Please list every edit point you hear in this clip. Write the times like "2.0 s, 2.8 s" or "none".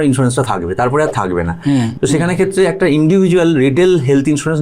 1.9 s